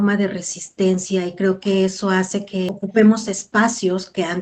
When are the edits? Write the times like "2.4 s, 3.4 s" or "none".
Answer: 2.7 s